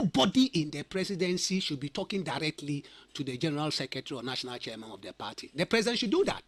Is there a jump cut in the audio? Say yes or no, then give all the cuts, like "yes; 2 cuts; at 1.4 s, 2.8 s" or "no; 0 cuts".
no; 0 cuts